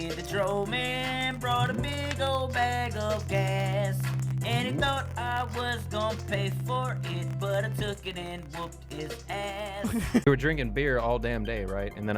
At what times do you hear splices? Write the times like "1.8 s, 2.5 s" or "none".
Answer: 10.3 s